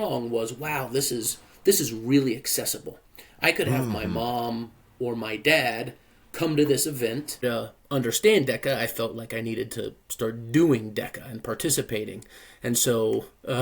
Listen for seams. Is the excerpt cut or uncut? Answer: cut